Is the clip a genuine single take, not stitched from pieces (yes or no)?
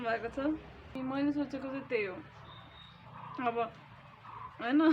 no